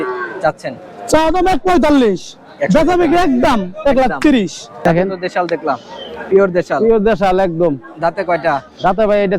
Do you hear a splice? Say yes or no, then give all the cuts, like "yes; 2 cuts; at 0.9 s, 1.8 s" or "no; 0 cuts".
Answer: yes; 1 cut; at 4.9 s